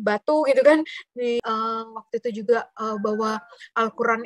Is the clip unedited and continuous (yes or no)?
no